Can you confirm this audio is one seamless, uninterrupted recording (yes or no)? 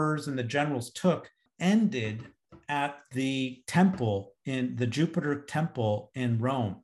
no